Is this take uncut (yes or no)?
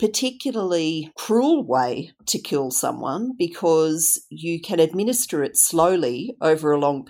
no